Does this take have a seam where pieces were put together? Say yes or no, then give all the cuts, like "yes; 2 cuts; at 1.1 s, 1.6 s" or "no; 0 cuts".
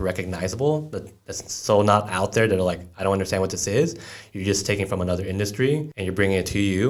no; 0 cuts